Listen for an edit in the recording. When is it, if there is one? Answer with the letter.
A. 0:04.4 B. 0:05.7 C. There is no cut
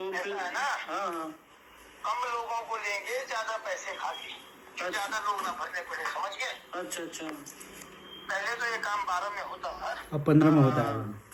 C